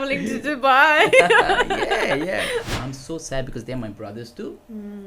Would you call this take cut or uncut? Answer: cut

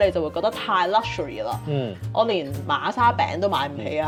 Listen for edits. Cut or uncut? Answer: uncut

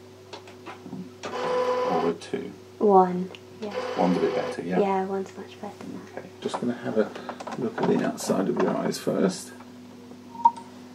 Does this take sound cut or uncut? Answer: cut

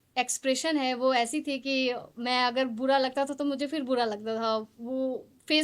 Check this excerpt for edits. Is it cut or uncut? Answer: uncut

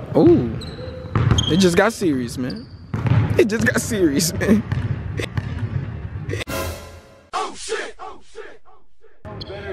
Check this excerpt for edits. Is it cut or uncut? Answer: uncut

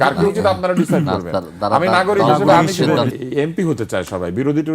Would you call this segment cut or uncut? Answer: cut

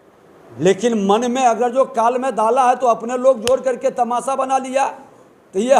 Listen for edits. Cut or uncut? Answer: uncut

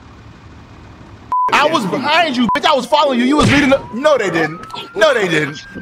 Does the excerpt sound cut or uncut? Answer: cut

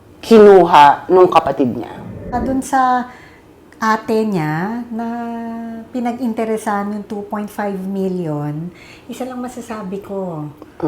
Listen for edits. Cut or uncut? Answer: cut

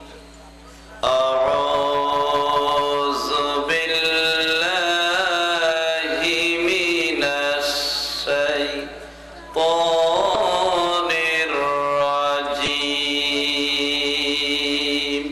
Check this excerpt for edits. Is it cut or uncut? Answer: cut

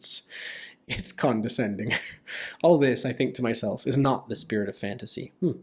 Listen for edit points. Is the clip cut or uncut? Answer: uncut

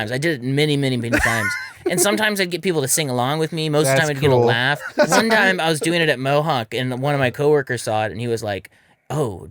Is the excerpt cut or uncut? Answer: cut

